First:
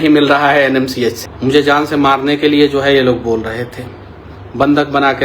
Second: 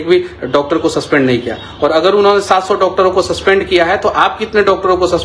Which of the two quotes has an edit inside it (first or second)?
first